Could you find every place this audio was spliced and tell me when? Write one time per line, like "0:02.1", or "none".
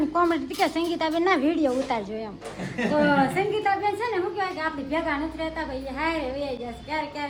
none

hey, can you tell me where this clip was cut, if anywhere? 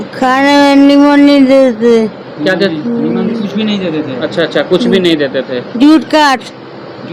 none

